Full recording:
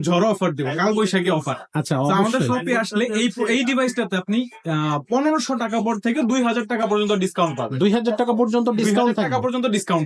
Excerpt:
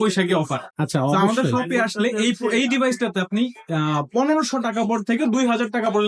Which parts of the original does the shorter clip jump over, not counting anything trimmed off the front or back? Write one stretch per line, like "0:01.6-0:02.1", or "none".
none